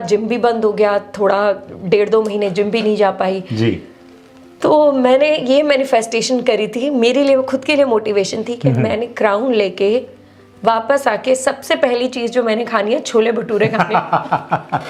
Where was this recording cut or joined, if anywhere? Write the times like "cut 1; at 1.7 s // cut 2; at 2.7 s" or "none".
none